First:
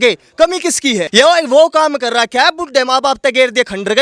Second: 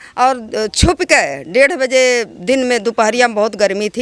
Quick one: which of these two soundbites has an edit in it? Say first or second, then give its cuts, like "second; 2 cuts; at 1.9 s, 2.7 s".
first; 1 cut; at 1.1 s